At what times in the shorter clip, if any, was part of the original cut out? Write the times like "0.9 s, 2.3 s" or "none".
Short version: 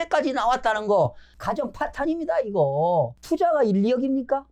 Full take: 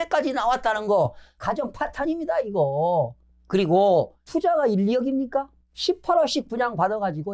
3.2 s